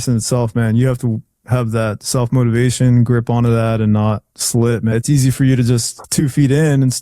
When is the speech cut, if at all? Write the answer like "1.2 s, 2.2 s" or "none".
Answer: 4.9 s, 6.0 s